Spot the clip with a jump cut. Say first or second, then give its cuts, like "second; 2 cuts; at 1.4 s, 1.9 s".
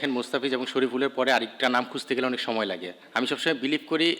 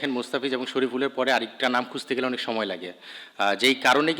first; 1 cut; at 3.0 s